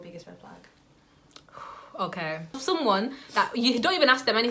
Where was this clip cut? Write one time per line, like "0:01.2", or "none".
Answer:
0:02.6

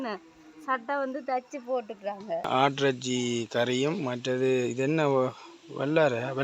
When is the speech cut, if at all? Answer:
0:02.5

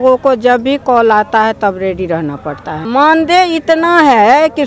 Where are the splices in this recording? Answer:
0:02.8

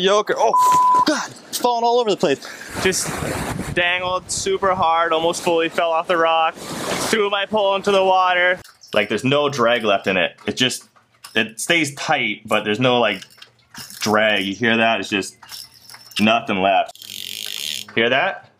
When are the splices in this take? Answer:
0:08.7
0:17.0

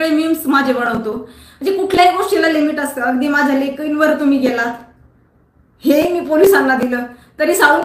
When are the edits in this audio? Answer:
none

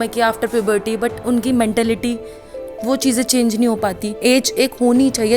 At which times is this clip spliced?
0:04.1

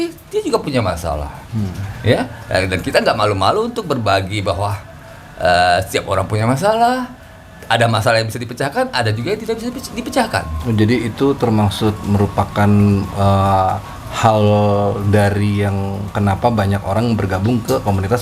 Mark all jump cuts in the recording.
none

